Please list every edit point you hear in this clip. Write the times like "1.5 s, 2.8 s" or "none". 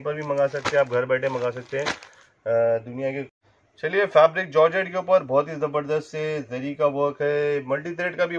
3.3 s